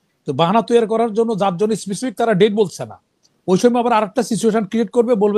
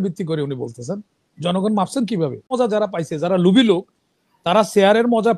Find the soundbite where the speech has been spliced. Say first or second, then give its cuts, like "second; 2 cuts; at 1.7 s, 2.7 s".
second; 1 cut; at 2.5 s